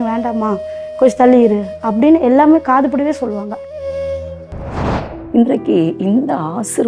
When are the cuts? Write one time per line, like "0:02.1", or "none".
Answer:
0:05.1